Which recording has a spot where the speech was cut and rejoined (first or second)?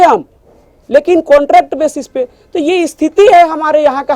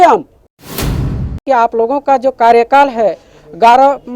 second